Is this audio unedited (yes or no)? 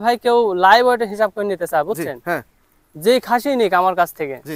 yes